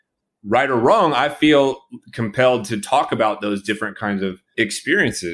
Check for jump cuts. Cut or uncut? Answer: cut